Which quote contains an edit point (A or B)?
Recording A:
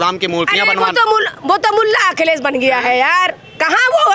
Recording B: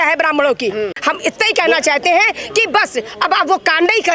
B